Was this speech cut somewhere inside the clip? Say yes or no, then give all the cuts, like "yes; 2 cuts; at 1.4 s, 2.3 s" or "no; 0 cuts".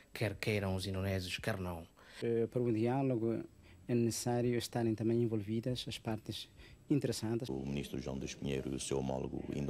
yes; 2 cuts; at 2.1 s, 7.5 s